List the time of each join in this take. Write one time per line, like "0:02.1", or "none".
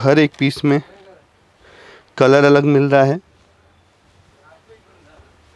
none